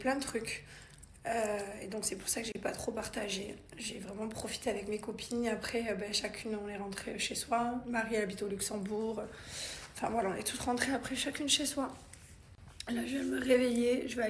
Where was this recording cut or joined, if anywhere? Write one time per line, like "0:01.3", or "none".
0:02.7